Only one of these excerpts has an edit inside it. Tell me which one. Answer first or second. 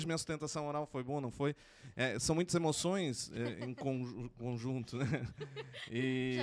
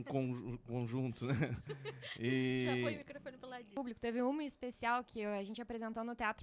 second